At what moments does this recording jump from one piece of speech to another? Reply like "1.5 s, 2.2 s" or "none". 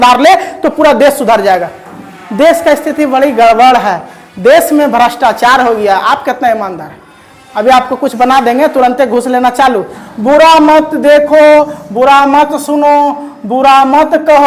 9.9 s